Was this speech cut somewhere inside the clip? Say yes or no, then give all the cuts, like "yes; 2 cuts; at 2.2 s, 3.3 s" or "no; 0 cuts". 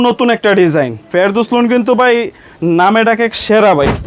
yes; 1 cut; at 1.0 s